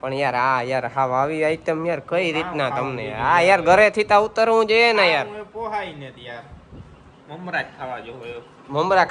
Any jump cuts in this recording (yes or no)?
no